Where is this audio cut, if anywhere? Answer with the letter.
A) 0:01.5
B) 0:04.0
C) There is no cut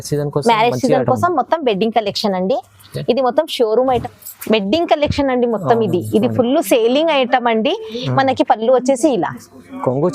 B